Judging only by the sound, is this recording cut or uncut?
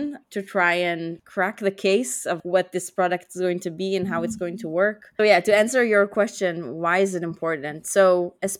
uncut